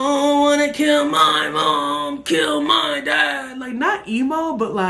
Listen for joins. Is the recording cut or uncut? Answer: uncut